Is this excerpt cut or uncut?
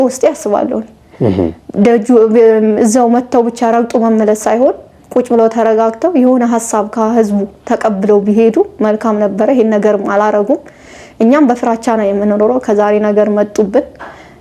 uncut